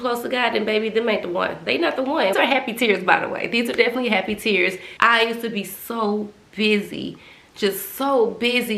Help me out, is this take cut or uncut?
cut